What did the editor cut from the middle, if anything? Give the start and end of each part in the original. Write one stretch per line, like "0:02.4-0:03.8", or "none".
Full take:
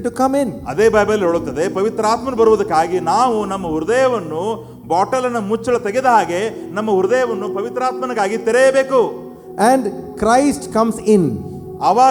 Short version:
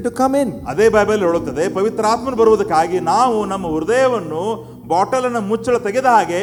none